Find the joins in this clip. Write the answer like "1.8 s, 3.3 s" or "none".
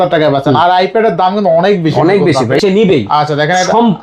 2.6 s